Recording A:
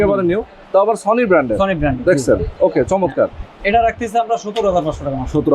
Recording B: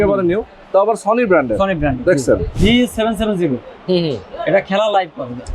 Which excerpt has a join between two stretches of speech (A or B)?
B